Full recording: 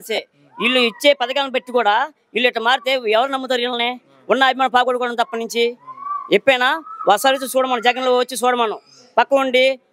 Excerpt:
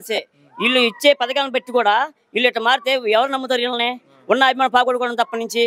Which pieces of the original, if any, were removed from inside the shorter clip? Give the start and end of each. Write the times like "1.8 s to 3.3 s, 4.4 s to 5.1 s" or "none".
none